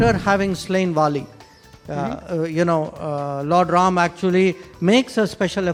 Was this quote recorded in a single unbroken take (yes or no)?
yes